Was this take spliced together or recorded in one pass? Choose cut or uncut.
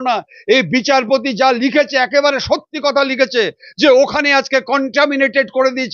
uncut